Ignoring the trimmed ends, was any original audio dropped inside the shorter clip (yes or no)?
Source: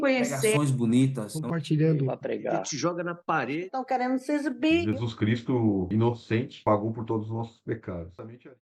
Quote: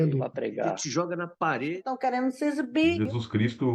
no